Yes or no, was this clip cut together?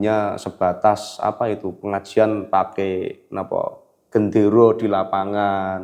no